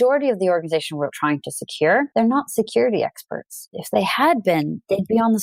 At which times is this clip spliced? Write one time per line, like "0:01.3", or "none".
0:02.1
0:03.6